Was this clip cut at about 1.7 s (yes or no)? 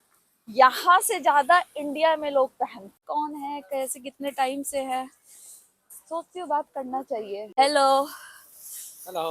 no